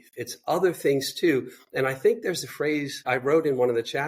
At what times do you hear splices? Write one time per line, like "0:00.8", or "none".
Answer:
0:03.0